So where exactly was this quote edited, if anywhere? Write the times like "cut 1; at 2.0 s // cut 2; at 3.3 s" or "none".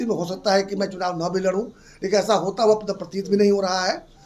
none